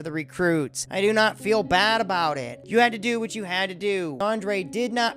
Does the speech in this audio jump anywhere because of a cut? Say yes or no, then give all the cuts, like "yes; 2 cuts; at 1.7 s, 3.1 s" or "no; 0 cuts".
yes; 2 cuts; at 2.6 s, 4.2 s